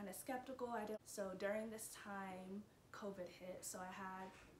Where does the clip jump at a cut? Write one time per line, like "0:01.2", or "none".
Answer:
0:01.0